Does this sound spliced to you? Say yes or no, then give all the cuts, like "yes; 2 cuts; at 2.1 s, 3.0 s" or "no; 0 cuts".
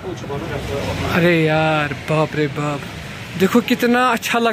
no; 0 cuts